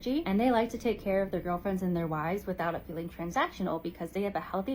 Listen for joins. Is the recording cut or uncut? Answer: uncut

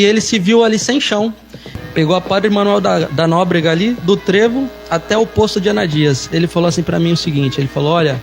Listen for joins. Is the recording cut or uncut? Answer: cut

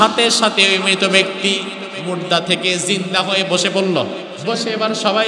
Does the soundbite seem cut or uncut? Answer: cut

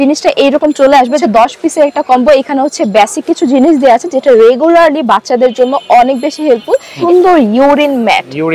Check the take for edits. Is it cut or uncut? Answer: cut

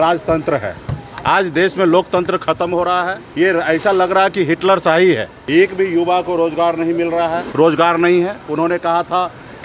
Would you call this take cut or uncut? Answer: cut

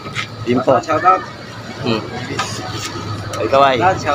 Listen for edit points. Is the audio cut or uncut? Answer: uncut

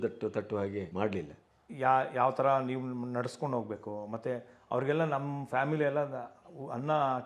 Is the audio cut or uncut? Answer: cut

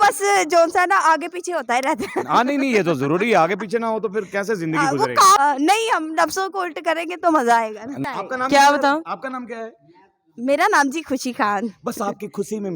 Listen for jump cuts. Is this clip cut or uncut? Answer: cut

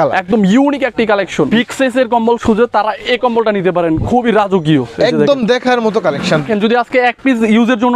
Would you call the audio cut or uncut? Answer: cut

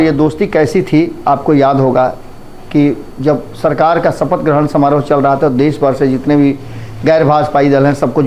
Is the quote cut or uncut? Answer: uncut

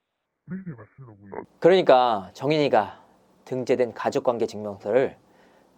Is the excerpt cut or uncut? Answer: cut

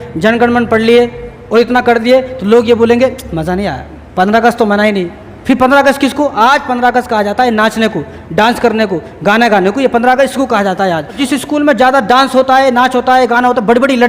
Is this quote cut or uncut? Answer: cut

